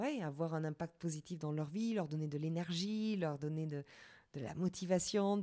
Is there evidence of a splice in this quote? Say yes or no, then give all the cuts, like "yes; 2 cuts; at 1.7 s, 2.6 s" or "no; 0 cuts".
no; 0 cuts